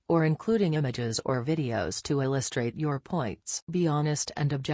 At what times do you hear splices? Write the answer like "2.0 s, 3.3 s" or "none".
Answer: 3.6 s